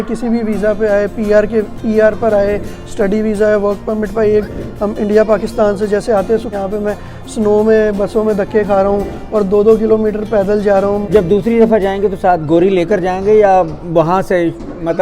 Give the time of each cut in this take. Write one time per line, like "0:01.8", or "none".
0:04.5
0:06.5
0:11.1